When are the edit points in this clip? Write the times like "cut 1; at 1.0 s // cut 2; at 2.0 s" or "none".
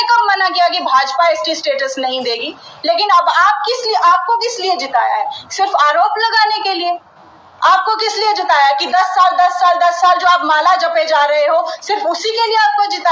none